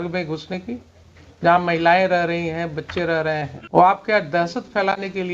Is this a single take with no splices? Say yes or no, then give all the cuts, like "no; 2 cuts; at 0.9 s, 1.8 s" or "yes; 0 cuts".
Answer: no; 1 cut; at 3.5 s